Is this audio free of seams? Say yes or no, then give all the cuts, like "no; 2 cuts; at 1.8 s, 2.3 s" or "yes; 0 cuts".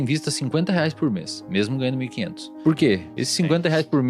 no; 2 cuts; at 2.5 s, 3.1 s